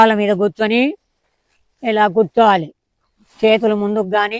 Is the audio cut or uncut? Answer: uncut